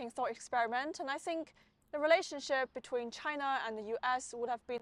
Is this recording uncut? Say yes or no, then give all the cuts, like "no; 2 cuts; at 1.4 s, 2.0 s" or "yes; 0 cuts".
yes; 0 cuts